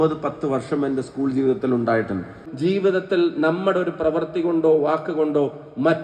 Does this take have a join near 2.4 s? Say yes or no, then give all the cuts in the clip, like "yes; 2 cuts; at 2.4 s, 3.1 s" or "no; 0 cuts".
yes; 1 cut; at 2.4 s